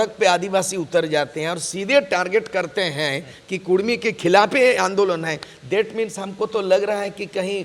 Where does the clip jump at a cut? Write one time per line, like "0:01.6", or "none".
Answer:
none